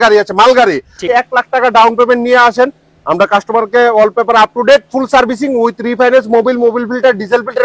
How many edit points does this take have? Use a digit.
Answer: 1